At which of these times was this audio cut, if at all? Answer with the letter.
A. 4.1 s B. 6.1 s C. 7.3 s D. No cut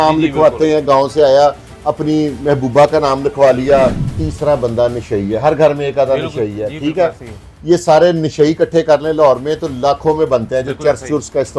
A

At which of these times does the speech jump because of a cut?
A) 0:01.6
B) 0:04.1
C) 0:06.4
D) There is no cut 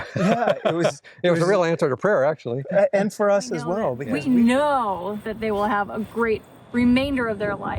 B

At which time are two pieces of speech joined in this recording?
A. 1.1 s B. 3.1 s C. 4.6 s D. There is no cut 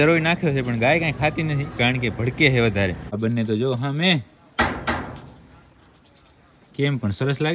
B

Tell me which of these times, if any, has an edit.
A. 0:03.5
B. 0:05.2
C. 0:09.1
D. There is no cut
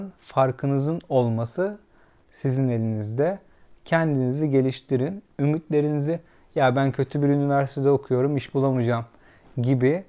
D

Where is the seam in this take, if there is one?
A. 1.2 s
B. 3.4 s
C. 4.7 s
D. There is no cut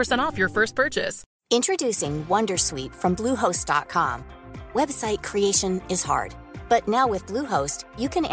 A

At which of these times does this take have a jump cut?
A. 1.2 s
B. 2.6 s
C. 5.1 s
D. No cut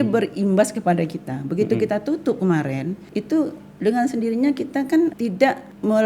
C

